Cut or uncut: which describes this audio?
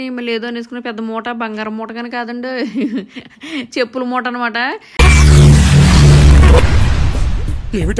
uncut